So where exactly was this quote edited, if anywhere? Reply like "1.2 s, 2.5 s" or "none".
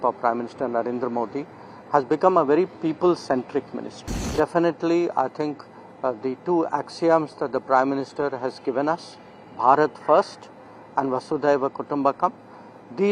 4.3 s